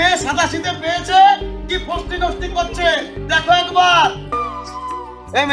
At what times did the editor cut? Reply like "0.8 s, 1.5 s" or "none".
4.4 s